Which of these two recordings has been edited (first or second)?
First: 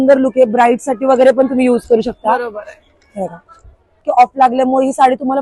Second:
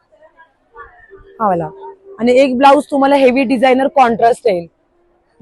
first